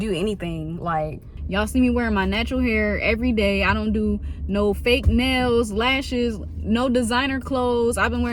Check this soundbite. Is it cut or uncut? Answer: cut